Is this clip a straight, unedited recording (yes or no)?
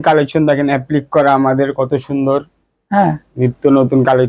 yes